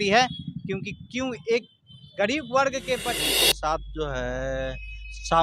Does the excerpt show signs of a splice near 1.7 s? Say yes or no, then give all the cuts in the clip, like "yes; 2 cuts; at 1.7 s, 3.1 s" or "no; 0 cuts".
no; 1 cut; at 3.2 s